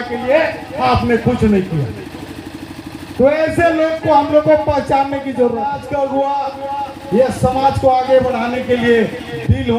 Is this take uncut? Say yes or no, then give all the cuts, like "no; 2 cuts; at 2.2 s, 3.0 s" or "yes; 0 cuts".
no; 1 cut; at 5.8 s